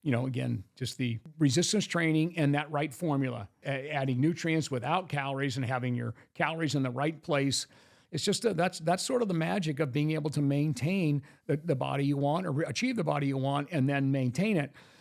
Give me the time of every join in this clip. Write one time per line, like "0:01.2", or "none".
0:01.2
0:03.6